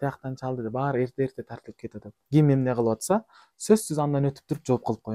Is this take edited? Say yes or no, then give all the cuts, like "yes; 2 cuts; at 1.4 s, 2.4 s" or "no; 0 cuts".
yes; 1 cut; at 2.2 s